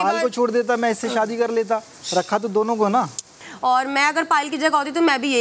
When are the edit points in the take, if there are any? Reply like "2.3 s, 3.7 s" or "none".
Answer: 3.5 s